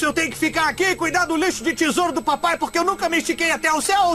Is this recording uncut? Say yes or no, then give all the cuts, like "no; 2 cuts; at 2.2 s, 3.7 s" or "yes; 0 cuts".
yes; 0 cuts